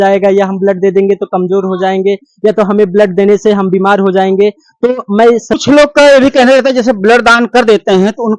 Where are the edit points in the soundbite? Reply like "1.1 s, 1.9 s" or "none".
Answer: 5.6 s